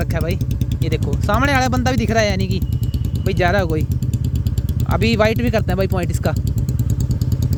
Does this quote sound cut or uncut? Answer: uncut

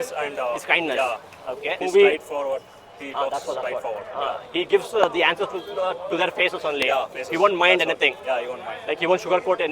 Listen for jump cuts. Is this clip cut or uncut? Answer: cut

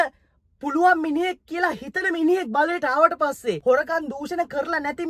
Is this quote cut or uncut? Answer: cut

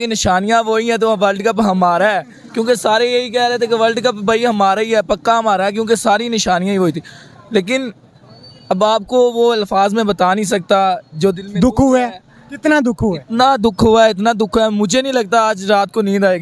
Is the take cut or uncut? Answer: uncut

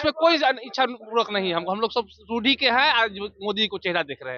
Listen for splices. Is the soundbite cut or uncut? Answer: uncut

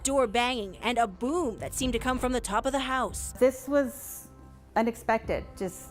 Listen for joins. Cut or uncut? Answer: cut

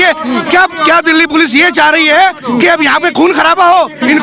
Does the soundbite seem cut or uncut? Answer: uncut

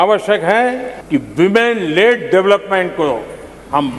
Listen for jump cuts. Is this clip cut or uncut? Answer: cut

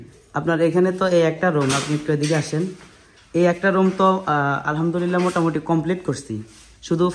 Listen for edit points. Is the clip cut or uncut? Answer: uncut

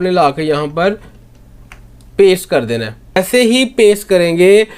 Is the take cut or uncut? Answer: cut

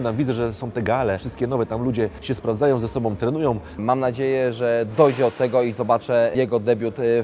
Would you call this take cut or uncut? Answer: cut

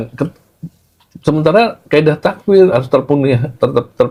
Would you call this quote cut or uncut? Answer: uncut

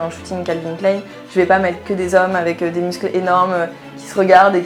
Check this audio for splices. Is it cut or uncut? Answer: uncut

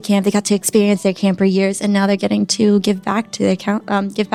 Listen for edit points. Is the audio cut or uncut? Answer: uncut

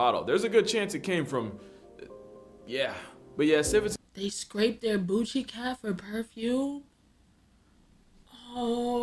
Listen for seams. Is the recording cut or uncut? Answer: cut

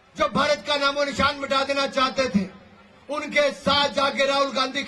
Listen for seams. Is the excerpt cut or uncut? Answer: uncut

